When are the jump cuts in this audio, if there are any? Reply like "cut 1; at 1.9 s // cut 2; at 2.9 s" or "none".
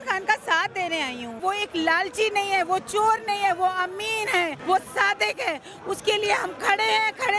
cut 1; at 1.4 s // cut 2; at 4.6 s